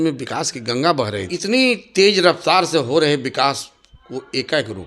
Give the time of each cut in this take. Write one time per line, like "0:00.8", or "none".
0:01.2